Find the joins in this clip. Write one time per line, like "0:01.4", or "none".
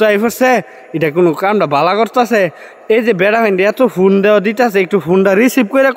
none